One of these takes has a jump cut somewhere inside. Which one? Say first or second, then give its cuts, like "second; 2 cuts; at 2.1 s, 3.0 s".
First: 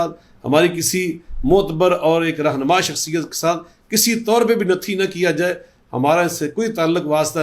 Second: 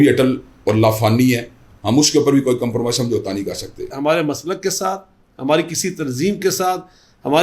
second; 1 cut; at 3.9 s